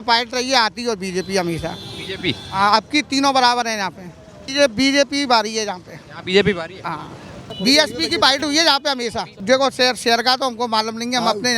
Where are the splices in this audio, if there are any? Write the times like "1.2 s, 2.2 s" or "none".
4.5 s, 7.4 s, 9.3 s